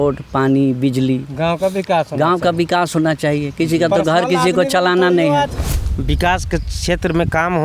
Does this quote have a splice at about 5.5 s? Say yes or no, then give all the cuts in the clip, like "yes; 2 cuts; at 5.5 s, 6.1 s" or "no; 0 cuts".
yes; 1 cut; at 5.5 s